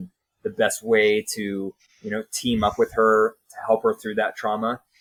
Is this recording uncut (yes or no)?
yes